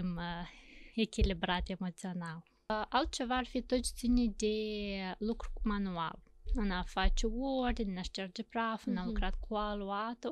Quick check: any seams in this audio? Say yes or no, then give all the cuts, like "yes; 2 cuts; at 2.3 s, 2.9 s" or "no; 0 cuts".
yes; 1 cut; at 2.7 s